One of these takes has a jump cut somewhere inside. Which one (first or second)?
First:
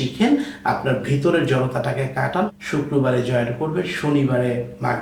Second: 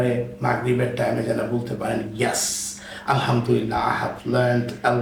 first